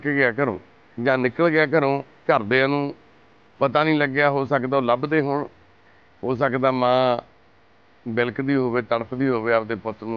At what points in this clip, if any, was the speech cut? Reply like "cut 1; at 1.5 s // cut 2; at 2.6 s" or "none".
none